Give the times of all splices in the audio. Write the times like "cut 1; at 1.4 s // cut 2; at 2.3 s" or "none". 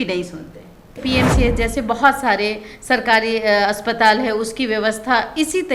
cut 1; at 1.0 s